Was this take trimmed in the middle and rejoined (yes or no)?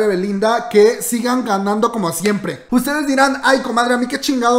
yes